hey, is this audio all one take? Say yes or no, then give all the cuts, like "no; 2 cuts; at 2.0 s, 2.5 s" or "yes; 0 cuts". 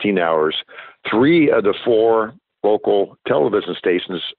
no; 1 cut; at 1.0 s